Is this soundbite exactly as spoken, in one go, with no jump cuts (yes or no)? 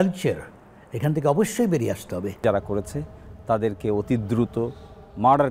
yes